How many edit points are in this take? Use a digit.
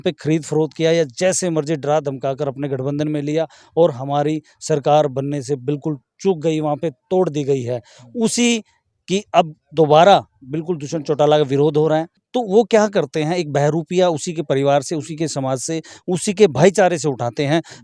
1